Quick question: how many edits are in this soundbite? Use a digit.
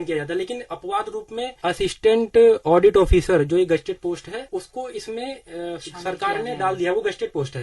2